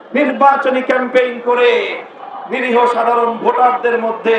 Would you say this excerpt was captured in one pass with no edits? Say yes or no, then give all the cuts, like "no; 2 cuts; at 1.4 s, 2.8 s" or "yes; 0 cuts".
yes; 0 cuts